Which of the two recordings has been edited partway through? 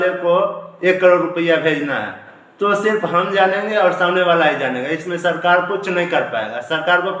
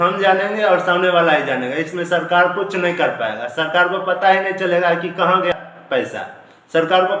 second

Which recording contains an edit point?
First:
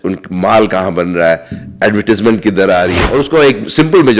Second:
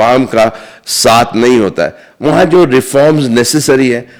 first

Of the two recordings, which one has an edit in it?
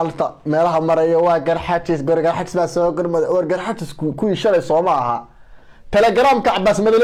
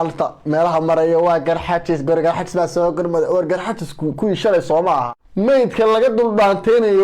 second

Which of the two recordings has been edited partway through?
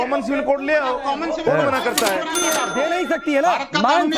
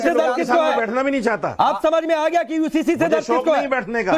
first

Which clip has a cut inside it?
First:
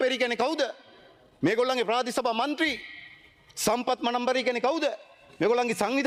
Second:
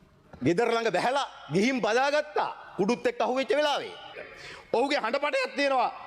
second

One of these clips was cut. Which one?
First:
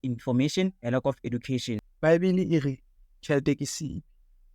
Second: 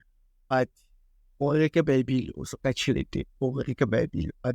first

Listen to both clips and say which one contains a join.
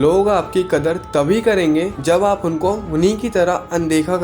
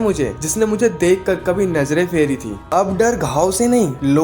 second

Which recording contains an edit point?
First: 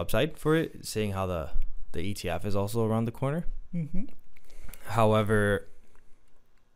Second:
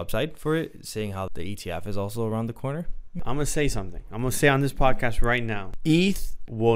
second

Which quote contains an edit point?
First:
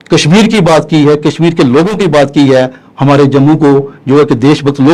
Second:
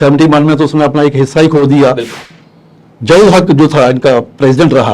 second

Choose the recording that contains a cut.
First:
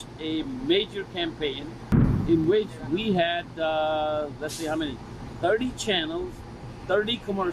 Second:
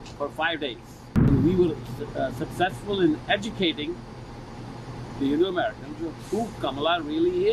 second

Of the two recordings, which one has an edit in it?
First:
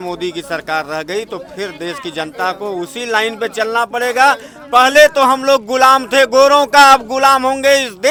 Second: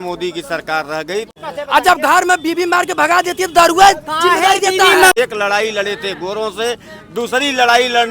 second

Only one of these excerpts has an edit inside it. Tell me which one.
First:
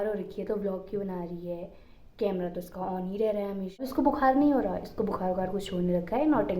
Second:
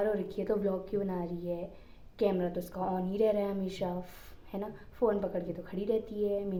first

